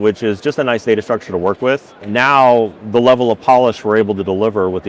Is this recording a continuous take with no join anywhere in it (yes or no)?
no